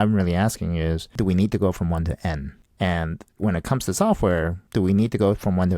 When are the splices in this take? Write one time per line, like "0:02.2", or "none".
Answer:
0:01.1
0:02.6
0:03.2
0:04.6